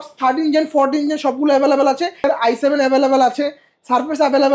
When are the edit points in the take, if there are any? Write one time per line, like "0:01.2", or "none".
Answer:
0:02.2